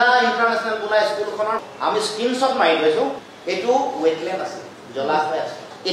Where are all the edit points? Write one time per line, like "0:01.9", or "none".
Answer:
none

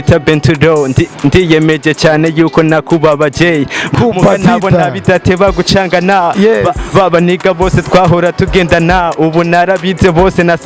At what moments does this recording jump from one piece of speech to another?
0:03.9

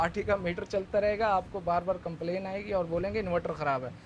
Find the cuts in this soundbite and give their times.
none

